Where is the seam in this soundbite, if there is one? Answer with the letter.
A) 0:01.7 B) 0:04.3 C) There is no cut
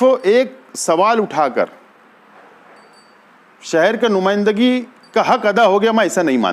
C